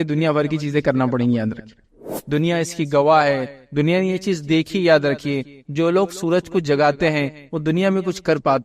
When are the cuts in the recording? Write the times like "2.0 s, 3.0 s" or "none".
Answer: 2.0 s